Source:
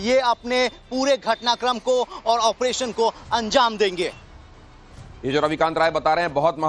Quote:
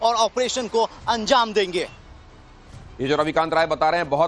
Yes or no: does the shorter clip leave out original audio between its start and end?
no